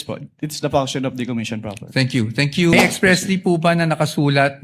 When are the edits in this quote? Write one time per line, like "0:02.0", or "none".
0:02.7